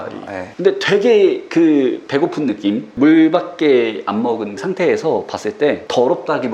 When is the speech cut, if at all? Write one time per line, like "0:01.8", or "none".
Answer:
0:02.9
0:04.6